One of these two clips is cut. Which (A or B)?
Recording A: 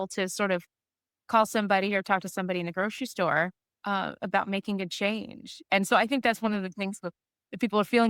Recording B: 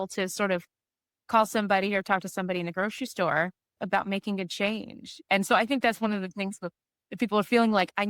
B